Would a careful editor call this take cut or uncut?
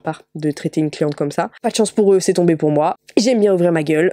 uncut